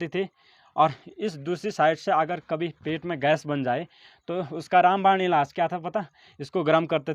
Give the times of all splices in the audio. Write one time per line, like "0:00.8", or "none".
none

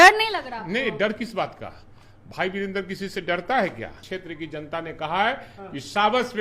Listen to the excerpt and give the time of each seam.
0:04.1

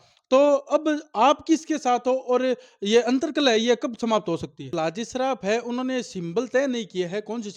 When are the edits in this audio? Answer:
0:04.7

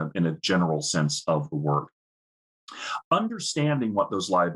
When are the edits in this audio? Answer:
none

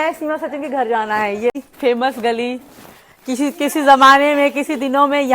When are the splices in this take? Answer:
0:01.5

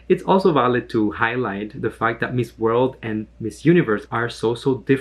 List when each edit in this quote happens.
0:04.0

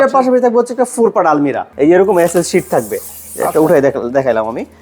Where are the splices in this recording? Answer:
0:01.6

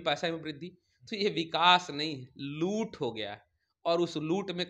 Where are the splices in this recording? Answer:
none

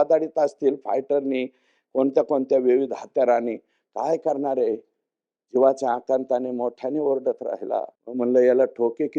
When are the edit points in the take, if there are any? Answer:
0:08.0

